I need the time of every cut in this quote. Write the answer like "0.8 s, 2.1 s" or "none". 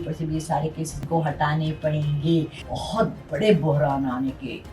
1.0 s, 2.6 s